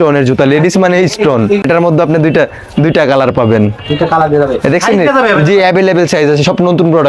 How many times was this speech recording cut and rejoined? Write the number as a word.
one